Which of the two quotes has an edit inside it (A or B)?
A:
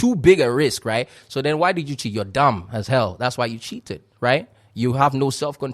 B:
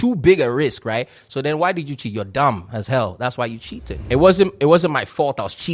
B